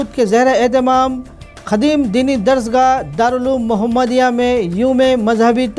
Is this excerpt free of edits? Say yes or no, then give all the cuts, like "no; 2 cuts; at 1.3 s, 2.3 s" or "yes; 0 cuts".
yes; 0 cuts